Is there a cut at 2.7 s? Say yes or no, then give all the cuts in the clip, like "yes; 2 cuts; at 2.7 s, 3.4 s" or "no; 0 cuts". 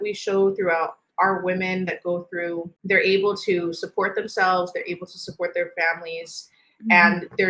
yes; 1 cut; at 2.7 s